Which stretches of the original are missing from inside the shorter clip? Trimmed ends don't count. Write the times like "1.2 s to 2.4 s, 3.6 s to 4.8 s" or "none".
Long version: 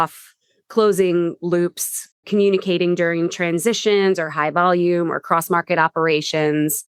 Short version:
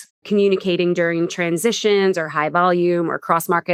none